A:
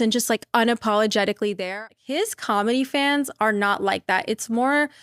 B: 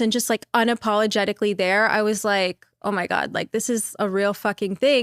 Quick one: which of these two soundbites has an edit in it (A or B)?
A